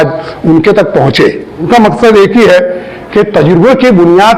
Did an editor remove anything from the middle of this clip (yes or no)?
yes